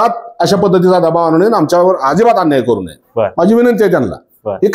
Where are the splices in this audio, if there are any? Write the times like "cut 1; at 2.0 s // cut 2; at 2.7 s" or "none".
none

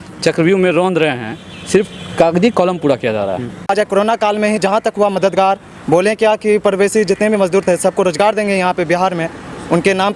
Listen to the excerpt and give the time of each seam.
cut 1; at 3.6 s

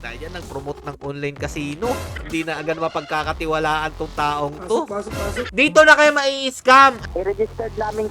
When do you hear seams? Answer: cut 1; at 2.1 s // cut 2; at 5.5 s // cut 3; at 7.0 s

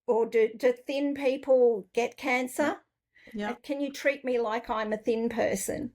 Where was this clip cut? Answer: cut 1; at 2.9 s

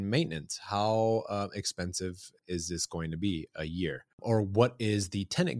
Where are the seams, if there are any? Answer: cut 1; at 2.4 s // cut 2; at 4.1 s

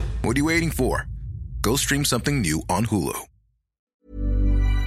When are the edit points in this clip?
cut 1; at 3.8 s

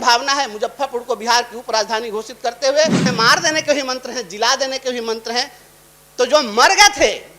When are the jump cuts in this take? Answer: cut 1; at 3.1 s

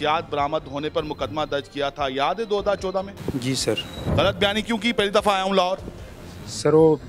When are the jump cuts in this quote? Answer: cut 1; at 4.0 s

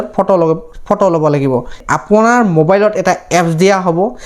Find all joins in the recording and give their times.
cut 1; at 1.9 s

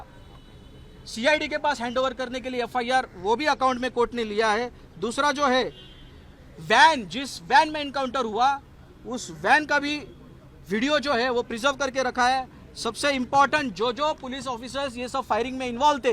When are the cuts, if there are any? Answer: none

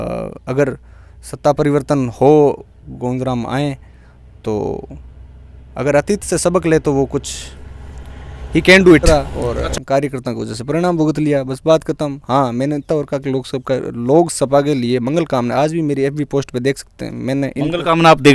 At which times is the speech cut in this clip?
cut 1; at 9.0 s

